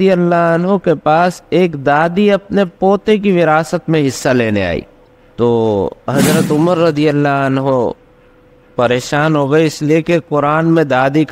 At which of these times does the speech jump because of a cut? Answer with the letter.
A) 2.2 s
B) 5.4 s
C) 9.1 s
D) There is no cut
D